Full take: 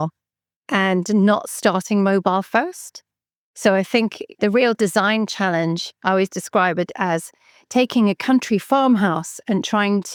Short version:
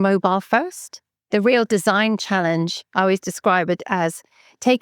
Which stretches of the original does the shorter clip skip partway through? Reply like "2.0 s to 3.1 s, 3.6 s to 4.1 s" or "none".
3.2 s to 4.2 s